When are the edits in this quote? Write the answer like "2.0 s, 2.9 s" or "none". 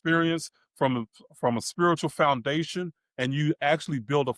none